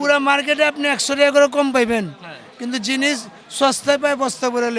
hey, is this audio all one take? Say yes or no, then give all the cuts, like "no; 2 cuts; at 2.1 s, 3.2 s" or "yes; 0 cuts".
yes; 0 cuts